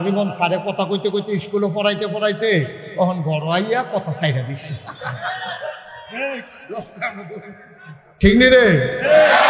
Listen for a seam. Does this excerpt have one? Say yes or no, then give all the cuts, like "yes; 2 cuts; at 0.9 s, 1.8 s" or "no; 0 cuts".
no; 0 cuts